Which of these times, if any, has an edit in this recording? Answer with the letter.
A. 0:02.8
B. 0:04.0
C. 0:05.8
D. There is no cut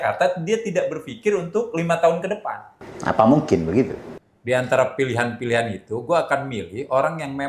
B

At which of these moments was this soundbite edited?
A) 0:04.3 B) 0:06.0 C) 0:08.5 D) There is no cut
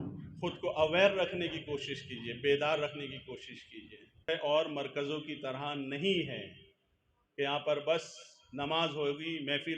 A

